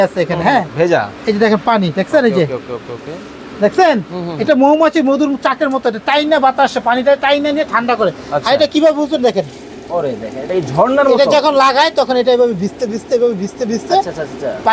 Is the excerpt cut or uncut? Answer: uncut